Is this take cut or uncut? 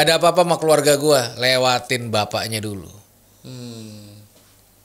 uncut